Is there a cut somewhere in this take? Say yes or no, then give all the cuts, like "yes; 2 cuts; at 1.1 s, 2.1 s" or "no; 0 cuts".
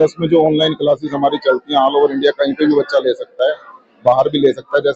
no; 0 cuts